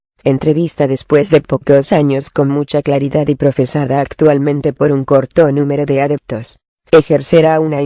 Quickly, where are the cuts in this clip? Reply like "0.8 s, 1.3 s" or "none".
none